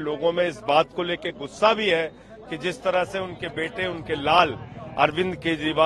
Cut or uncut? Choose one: uncut